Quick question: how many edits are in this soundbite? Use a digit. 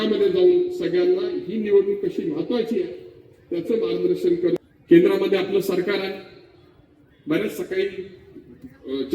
1